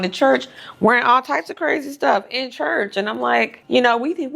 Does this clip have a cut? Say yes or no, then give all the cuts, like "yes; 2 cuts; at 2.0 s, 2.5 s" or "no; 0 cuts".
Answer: no; 0 cuts